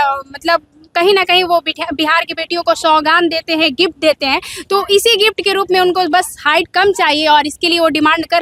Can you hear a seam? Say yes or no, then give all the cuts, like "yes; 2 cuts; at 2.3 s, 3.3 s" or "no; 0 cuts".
no; 0 cuts